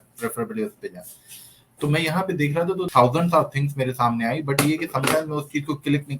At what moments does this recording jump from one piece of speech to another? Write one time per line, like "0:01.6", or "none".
0:02.9